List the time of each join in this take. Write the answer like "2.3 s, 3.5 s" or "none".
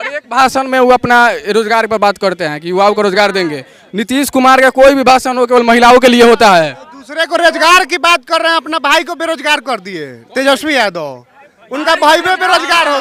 none